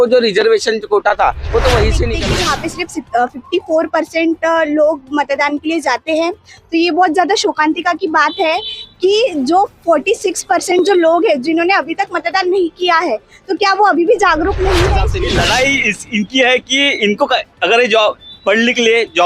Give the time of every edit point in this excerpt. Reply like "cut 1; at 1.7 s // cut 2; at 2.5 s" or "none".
cut 1; at 2.1 s // cut 2; at 15.2 s